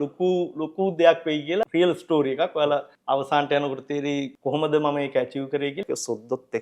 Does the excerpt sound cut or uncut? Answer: cut